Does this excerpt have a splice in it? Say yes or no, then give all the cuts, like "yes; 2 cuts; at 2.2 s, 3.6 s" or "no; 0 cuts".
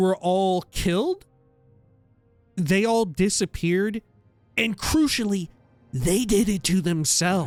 no; 0 cuts